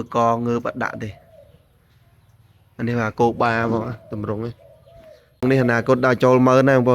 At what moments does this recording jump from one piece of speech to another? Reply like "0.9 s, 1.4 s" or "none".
5.4 s